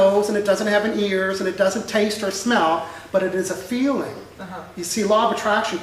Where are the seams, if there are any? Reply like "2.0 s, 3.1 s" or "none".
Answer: 1.3 s